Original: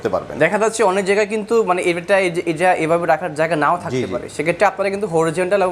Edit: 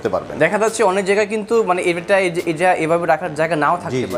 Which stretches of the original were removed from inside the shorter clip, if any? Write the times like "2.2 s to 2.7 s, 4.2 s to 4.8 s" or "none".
none

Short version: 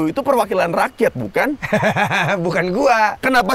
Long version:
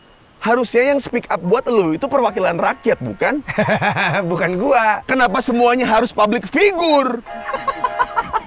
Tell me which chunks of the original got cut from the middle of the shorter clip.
none

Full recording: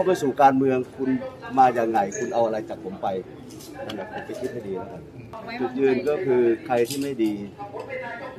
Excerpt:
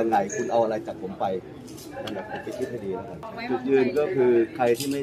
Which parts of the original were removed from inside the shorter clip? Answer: 5.0 s to 5.3 s

